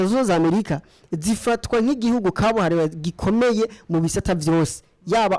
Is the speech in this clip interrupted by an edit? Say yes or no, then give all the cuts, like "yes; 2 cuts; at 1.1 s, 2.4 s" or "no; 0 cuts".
no; 0 cuts